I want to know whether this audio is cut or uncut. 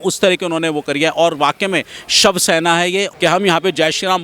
cut